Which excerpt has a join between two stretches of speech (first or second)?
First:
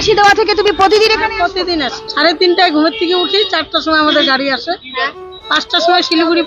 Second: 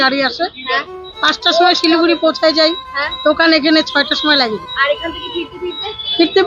first